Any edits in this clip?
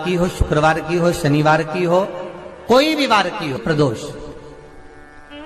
yes; 1 cut; at 3.6 s

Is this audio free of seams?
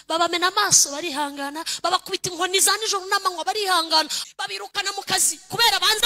no; 1 cut; at 4.2 s

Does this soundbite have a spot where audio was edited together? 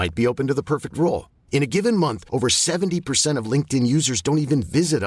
no; 0 cuts

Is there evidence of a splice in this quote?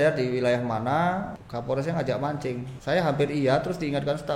yes; 2 cuts; at 1.4 s, 2.7 s

